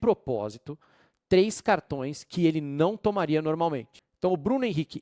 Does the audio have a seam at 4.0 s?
yes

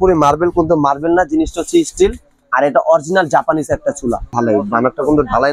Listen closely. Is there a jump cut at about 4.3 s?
yes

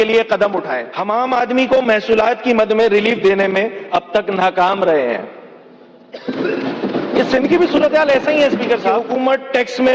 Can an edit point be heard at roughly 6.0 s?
no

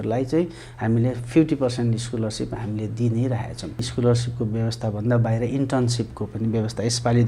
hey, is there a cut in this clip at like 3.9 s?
yes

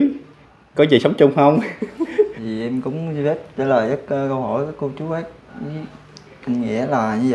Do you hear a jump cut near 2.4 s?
yes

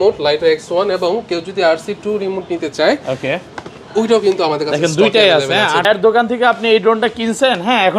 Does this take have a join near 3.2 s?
no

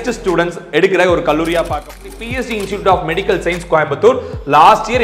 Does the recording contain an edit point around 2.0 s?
yes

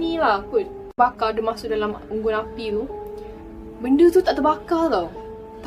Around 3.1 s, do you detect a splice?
no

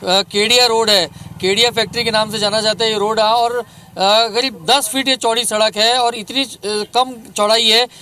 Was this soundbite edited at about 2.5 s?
no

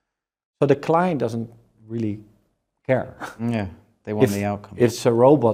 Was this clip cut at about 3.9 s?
no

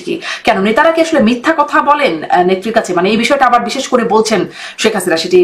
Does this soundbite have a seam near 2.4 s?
no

